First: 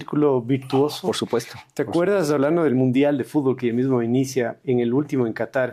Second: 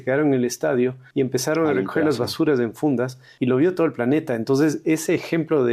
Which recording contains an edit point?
second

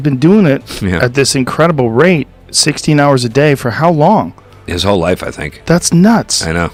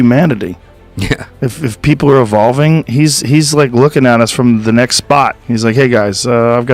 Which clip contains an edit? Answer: second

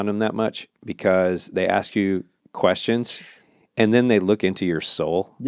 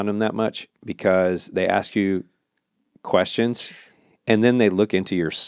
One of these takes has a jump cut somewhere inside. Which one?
first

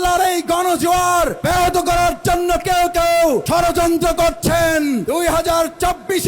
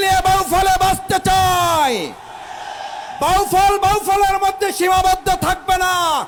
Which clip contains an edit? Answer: first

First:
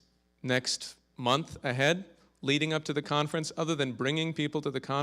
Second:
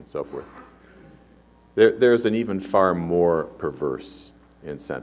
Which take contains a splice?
first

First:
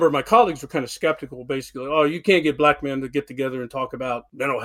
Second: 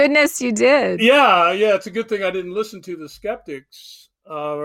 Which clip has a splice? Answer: second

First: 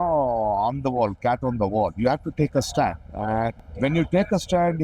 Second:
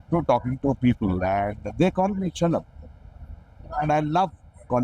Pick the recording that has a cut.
first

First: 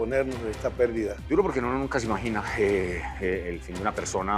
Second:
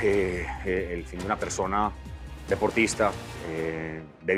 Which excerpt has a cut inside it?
first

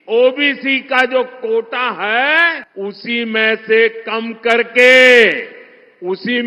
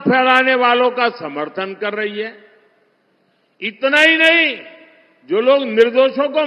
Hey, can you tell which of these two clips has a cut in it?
first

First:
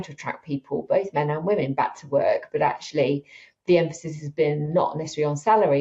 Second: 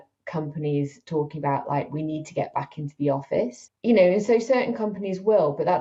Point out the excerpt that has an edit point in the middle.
second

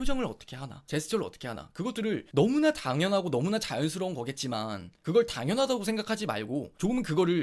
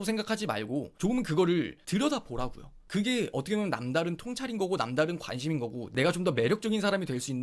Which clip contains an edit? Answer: second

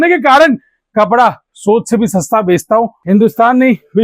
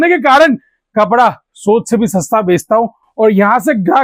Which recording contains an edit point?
first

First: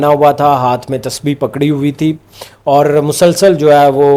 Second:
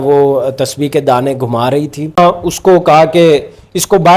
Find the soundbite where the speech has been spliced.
second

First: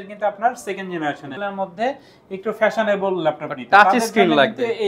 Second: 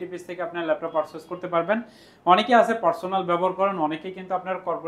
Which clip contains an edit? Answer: first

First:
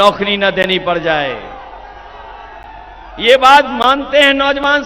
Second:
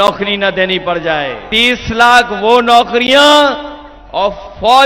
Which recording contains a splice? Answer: second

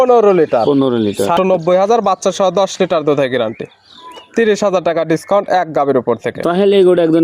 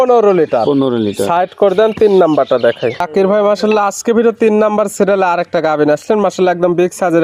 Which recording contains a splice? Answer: first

